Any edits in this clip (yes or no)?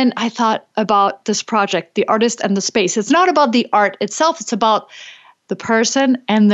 no